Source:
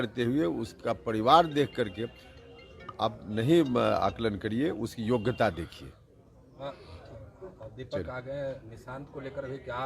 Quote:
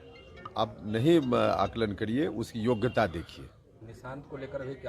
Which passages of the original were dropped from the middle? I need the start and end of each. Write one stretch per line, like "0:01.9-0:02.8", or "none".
0:06.3-0:08.7

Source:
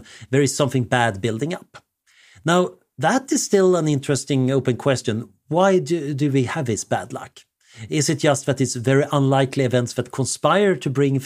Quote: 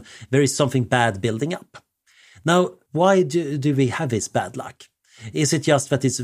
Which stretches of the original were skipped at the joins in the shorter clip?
0:02.8-0:05.4

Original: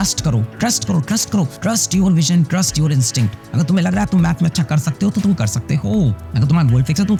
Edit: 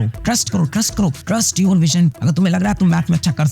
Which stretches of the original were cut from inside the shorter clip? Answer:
0:02.5-0:03.5

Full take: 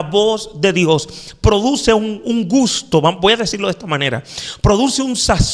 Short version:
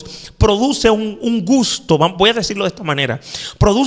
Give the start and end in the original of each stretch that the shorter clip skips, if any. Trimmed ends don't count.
none

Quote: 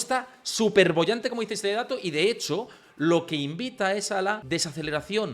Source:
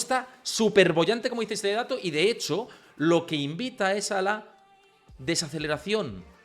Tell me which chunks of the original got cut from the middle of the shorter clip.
0:04.4-0:05.2

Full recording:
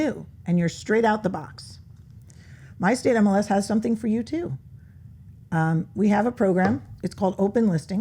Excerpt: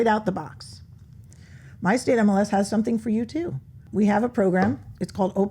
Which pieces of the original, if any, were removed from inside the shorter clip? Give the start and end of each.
0:04.8-0:05.9

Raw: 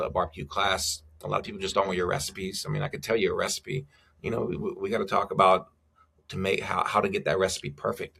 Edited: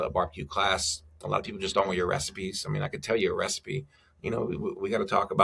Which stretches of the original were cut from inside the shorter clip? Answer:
none

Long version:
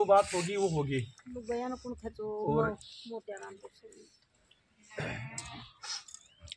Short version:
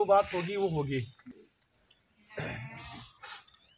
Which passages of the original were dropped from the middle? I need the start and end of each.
0:01.2-0:03.8

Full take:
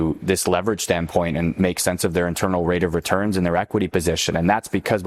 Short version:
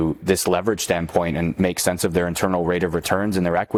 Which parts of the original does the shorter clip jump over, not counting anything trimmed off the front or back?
none

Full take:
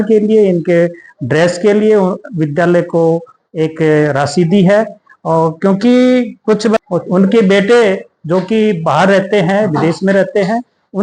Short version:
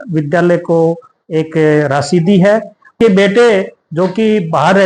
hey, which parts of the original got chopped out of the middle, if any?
0:05.2-0:07.3

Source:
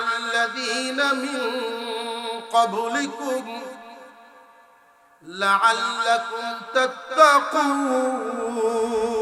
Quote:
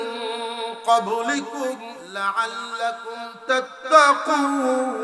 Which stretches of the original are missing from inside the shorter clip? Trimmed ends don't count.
0:03.6-0:05.2

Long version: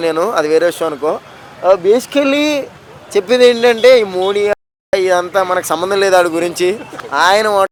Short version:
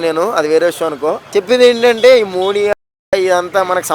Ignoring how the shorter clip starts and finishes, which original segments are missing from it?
0:01.2-0:03.0

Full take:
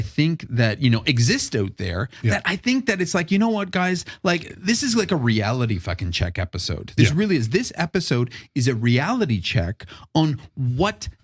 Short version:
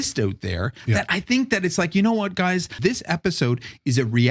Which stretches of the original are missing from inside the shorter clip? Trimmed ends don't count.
0:04.1-0:07.5

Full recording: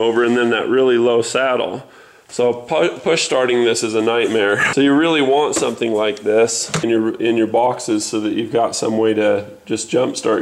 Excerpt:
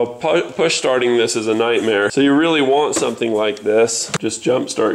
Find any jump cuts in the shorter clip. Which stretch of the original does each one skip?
0:04.6-0:04.7
0:06.7-0:09.5

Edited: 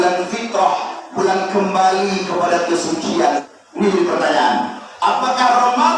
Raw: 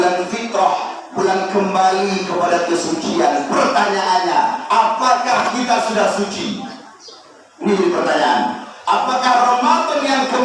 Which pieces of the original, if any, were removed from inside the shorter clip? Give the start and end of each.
0:03.4-0:07.3

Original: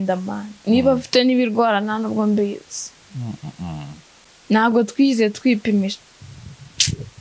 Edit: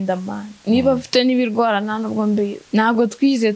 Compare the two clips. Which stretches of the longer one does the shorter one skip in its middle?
0:02.6-0:04.4

